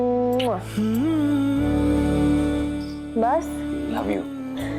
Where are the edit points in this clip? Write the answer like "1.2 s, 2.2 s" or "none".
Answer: 3.9 s